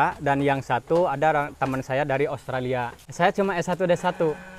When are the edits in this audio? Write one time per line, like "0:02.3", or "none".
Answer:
0:02.9